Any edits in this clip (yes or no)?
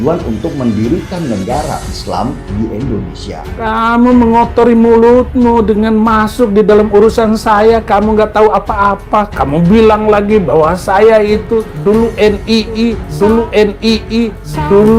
yes